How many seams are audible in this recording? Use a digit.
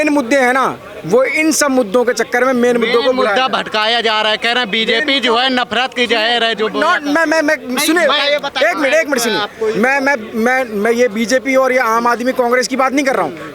0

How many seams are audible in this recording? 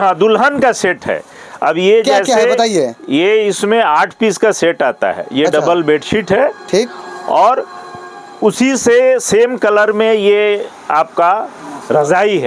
0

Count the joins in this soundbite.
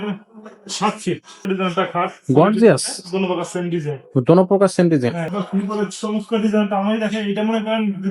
2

